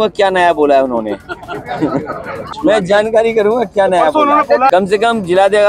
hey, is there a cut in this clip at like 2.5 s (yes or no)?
yes